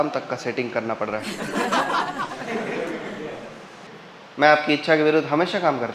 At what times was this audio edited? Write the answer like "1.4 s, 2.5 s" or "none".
3.8 s